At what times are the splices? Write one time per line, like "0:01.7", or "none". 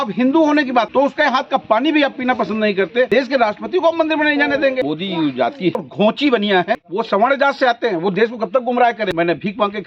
0:00.9
0:03.1
0:04.9
0:05.8
0:06.8
0:09.1